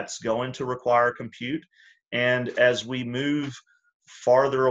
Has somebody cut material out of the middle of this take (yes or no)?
no